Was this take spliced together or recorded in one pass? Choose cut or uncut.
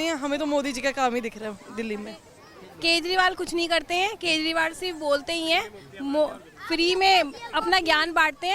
uncut